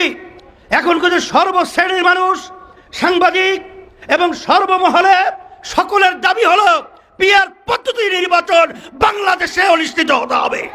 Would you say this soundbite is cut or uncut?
uncut